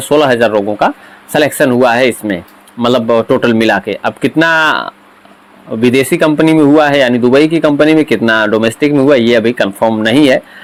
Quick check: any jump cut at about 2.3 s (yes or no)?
no